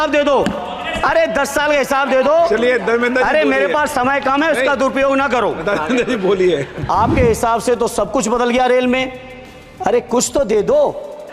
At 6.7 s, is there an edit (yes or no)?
yes